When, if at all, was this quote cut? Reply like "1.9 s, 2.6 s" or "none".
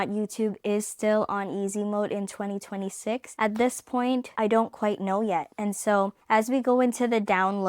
3.3 s, 4.3 s, 5.5 s